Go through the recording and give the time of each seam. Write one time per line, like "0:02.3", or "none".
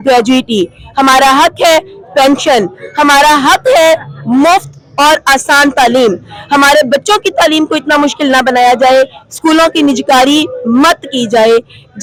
none